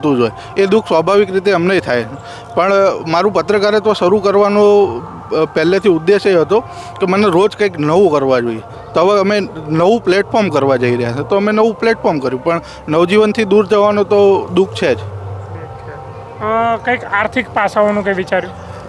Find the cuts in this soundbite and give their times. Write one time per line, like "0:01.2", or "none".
none